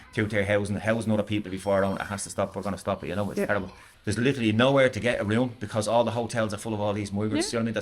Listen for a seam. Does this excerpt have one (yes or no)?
yes